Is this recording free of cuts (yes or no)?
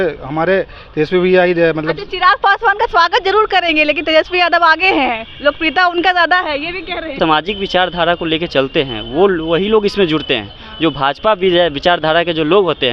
no